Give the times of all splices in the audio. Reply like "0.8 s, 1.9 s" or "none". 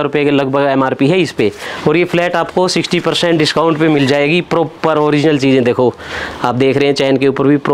none